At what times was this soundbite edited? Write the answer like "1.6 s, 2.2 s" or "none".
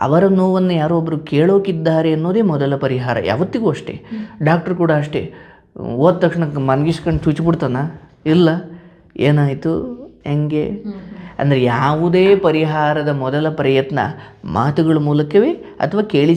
none

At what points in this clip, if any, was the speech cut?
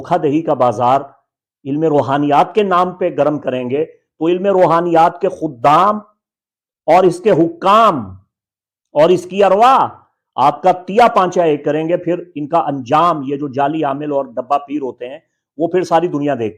none

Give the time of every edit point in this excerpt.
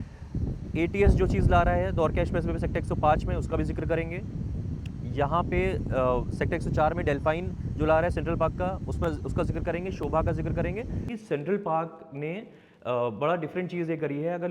11.1 s

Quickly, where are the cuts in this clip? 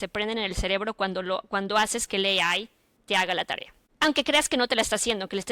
none

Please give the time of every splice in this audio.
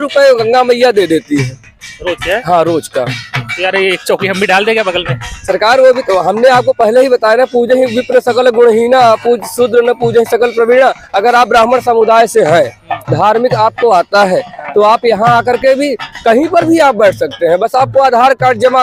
none

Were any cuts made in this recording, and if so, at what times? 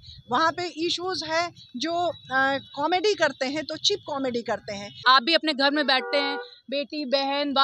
5.0 s

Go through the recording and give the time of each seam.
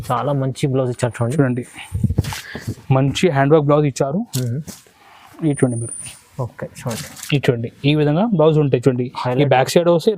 none

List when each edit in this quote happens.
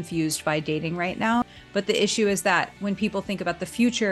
1.4 s

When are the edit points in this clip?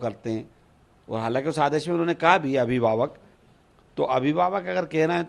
none

